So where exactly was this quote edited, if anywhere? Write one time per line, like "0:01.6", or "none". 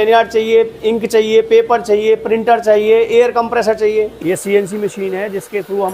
0:04.1